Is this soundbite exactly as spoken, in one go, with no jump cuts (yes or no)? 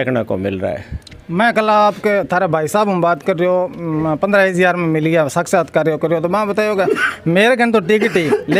yes